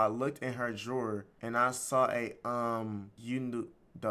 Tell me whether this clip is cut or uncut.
cut